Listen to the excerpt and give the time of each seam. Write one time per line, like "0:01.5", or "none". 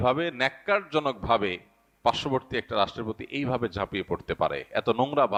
none